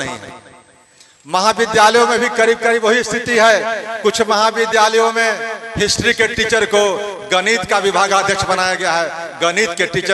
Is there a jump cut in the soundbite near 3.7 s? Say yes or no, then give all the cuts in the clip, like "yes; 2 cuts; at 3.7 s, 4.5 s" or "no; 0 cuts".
no; 0 cuts